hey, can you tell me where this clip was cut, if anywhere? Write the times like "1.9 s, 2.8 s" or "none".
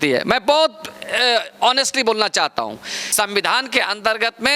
3.0 s